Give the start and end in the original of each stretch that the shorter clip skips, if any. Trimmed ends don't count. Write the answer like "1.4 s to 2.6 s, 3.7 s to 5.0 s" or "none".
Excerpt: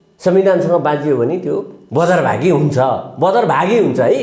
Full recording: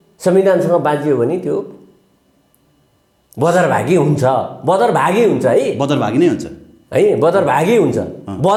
1.8 s to 3.2 s